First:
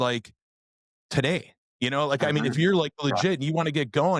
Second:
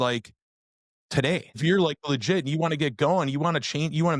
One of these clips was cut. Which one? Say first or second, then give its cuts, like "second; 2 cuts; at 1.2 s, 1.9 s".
second; 1 cut; at 1.6 s